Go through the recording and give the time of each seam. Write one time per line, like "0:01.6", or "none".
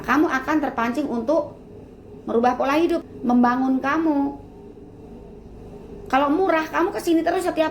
0:03.1